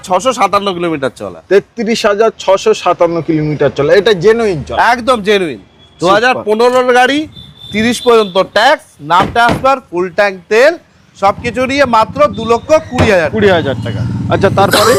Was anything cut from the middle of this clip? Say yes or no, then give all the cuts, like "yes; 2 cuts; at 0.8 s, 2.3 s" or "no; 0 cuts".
no; 0 cuts